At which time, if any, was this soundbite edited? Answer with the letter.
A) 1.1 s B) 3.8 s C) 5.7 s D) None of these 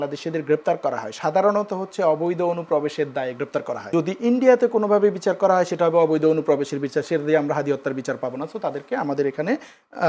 B